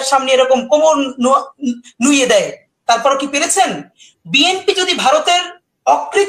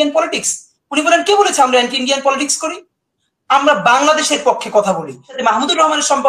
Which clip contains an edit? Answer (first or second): second